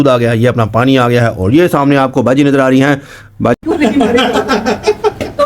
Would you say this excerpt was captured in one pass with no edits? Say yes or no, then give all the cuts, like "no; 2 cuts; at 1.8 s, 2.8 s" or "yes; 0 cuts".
no; 1 cut; at 3.6 s